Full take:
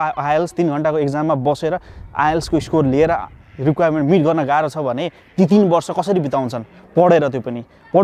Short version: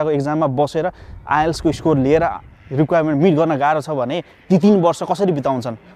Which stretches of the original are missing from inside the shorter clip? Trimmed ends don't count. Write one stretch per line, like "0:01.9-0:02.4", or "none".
none

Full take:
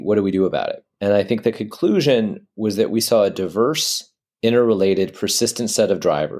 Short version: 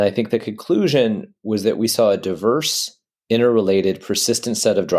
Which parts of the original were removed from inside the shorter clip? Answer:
none

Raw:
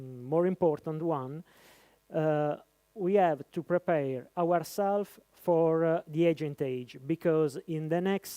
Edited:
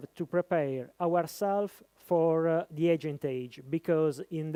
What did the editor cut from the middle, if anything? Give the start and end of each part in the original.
none

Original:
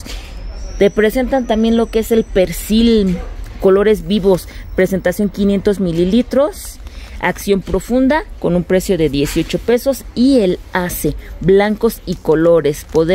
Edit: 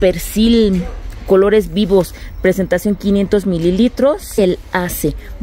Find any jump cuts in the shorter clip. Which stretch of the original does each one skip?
0:06.7-0:10.4

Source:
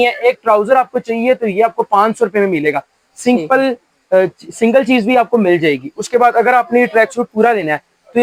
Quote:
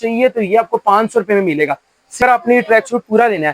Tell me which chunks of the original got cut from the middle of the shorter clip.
0:03.2-0:06.4

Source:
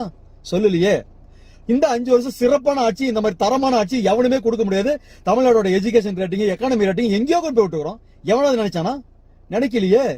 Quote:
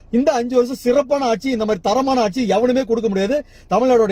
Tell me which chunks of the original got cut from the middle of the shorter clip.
none

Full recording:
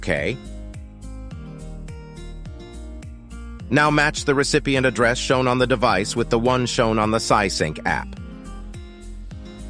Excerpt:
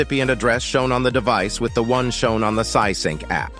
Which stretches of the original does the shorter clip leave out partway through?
none

